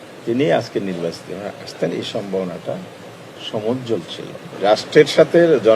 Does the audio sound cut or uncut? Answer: cut